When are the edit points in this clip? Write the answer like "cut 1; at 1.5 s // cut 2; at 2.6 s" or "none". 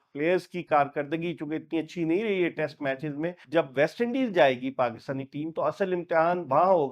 cut 1; at 3.4 s